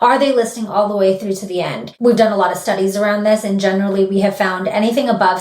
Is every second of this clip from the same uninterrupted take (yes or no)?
no